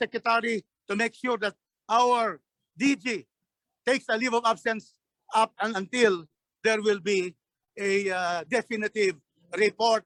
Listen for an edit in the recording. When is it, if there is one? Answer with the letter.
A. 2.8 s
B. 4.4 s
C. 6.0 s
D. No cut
D